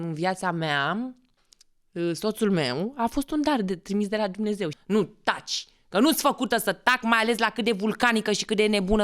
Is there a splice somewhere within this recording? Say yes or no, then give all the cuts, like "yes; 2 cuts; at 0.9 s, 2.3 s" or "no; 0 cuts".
yes; 1 cut; at 4.8 s